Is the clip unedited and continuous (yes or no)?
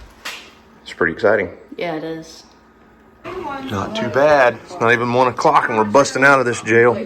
no